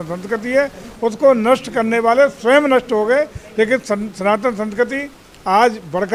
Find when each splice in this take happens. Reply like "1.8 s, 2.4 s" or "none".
none